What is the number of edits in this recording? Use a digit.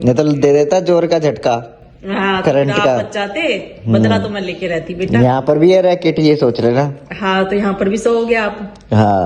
0